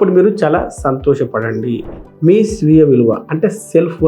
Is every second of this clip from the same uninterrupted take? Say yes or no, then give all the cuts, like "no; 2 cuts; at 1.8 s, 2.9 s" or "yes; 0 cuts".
no; 1 cut; at 2.1 s